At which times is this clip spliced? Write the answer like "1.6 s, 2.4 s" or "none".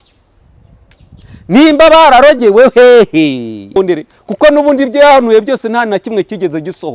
3.8 s